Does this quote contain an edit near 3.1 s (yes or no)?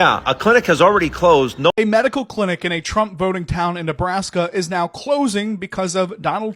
no